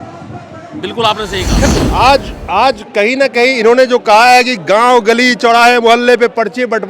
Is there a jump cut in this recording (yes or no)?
yes